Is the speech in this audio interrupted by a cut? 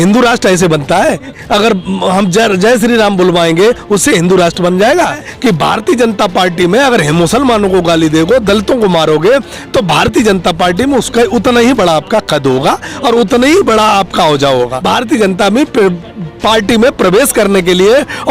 yes; 3 cuts; at 1.3 s, 5.3 s, 14.8 s

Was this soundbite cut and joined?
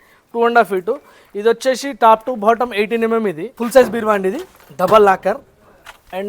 yes; 1 cut; at 3.5 s

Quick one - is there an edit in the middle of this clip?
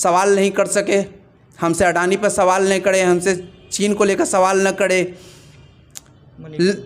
no; 0 cuts

